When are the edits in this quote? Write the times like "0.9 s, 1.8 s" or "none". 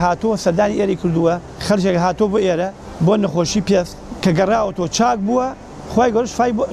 1.5 s, 2.8 s, 4.0 s